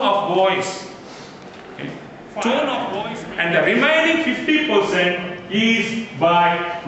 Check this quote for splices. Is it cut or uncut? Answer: cut